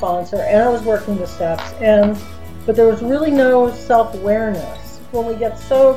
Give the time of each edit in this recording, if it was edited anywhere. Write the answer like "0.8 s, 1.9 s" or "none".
5.0 s